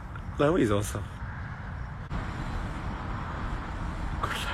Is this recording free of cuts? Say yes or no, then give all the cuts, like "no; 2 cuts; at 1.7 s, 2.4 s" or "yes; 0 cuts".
yes; 0 cuts